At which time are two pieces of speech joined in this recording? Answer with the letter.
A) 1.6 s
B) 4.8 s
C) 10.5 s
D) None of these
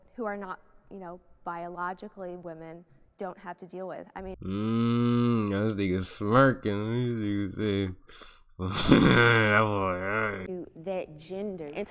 C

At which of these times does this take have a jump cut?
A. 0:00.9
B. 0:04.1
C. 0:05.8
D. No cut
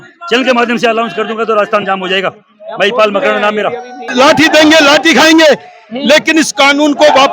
B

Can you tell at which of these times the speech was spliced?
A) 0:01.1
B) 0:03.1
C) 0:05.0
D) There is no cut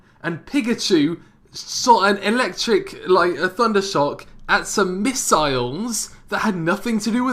C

